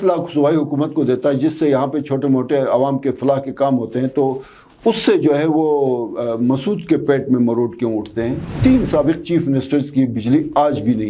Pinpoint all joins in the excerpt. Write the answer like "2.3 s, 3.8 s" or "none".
8.4 s